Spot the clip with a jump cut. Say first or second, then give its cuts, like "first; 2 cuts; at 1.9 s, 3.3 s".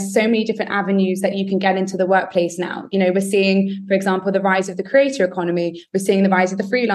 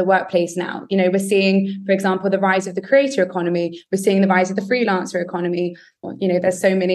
second; 1 cut; at 6.0 s